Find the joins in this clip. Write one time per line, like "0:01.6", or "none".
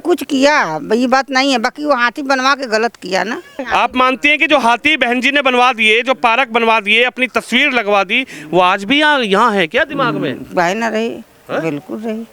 0:03.6